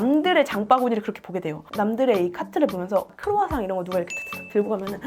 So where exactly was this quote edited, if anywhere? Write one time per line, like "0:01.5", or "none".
0:03.0